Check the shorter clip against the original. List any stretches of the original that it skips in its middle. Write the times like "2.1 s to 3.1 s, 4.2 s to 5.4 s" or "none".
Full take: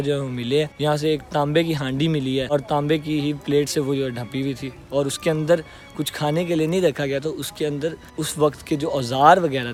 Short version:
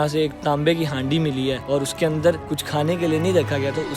2.5 s to 4.8 s, 5.8 s to 6.0 s